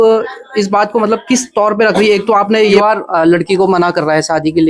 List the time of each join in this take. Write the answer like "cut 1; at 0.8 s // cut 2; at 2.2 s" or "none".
cut 1; at 2.8 s